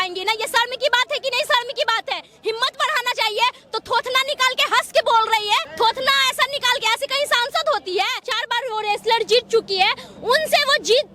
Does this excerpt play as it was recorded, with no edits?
no; 2 cuts; at 5.7 s, 8.3 s

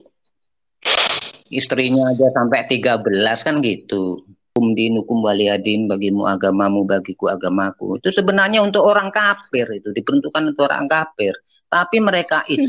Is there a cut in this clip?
yes; 1 cut; at 4.5 s

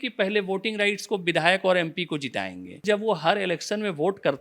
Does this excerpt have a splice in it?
yes; 1 cut; at 2.8 s

